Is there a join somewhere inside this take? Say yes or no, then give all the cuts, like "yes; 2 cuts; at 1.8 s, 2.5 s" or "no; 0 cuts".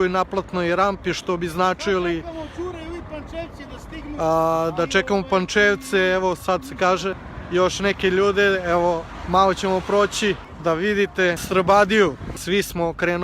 yes; 4 cuts; at 7.3 s, 10.5 s, 11.4 s, 12.3 s